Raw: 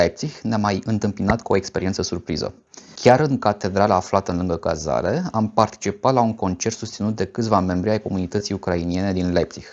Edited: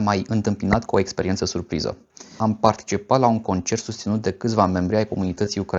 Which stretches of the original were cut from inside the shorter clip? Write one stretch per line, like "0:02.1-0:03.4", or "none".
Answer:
0:02.9-0:05.3